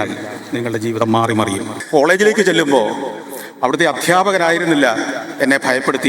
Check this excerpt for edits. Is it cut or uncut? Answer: cut